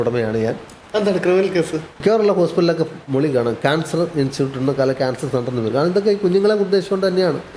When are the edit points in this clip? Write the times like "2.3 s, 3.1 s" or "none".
2.0 s